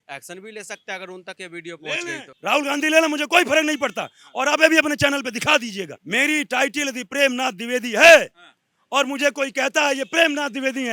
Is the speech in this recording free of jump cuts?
yes; 0 cuts

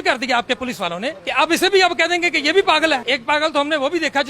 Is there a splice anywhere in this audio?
yes; 1 cut; at 3.0 s

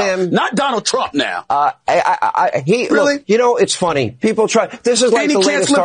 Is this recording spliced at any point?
yes; 1 cut; at 1.4 s

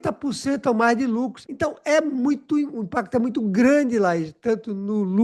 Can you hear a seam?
yes; 1 cut; at 1.4 s

